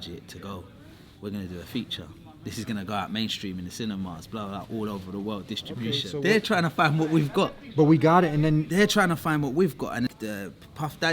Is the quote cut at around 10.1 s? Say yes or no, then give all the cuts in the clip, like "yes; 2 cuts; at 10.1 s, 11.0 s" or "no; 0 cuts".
yes; 2 cuts; at 6.0 s, 10.1 s